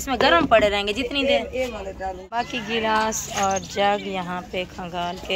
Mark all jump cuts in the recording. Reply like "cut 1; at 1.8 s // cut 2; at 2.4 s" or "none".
cut 1; at 2.2 s